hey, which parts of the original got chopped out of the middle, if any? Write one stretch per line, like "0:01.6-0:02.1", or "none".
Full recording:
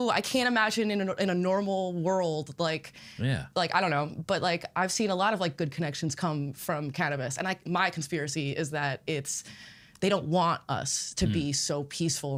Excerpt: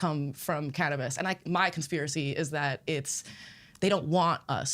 none